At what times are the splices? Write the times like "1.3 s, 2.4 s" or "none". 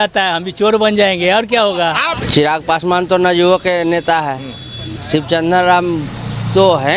2.1 s